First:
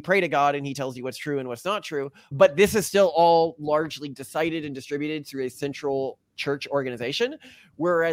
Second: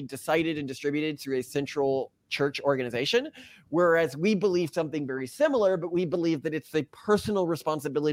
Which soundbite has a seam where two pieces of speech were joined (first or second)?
first